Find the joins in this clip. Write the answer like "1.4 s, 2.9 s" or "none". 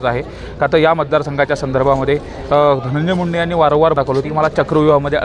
3.9 s